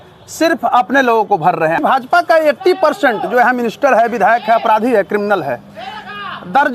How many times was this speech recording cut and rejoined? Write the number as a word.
one